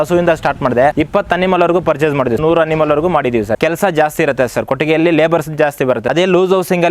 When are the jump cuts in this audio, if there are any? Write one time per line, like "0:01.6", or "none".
0:00.9
0:02.4
0:03.6
0:06.1

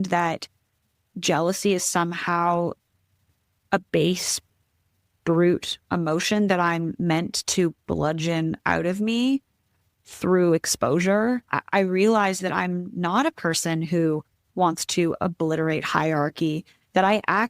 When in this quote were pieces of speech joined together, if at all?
0:11.6

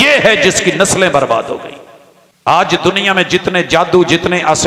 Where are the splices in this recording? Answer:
0:02.5

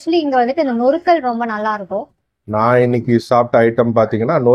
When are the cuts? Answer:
0:02.3

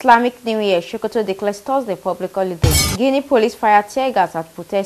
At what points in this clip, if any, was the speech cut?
0:02.9

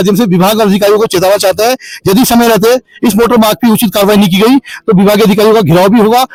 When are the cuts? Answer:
none

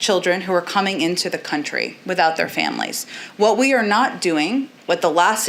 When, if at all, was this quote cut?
none

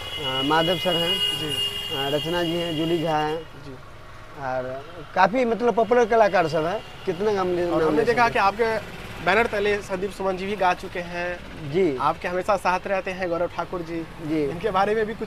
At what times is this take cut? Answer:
none

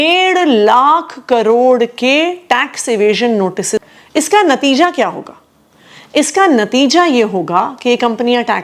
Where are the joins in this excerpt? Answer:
0:03.9

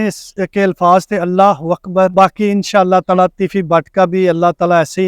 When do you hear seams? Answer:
0:02.1

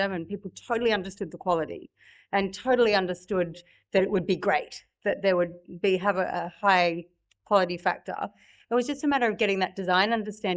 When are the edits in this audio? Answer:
none

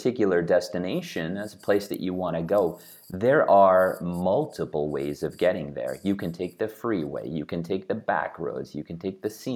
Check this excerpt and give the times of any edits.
none

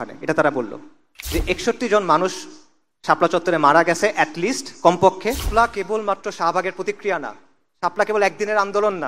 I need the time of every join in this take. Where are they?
0:01.1
0:05.5

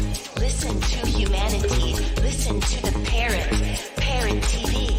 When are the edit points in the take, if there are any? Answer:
none

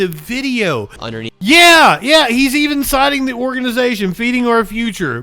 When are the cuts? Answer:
0:01.0

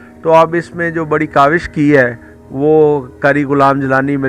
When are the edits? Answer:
none

